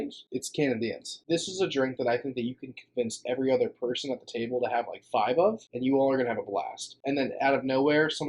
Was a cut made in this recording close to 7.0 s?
yes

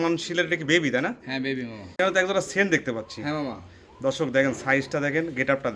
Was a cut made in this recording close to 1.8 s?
yes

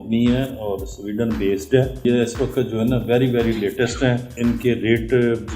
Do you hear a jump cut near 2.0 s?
yes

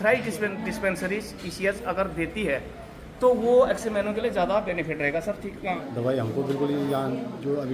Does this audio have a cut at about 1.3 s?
no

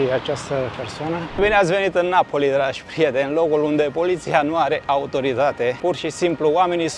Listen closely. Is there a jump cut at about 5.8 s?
yes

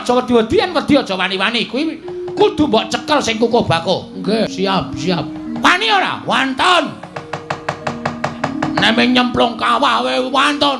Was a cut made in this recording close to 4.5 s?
yes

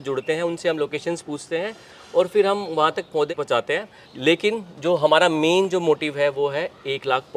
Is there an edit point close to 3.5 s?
yes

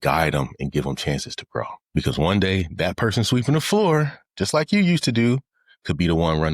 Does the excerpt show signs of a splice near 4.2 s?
no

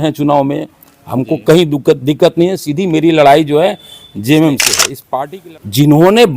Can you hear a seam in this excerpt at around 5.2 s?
yes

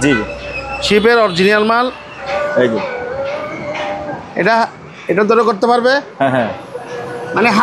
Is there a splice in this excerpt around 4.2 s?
no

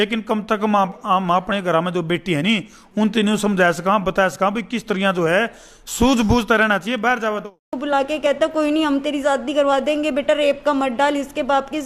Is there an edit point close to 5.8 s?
no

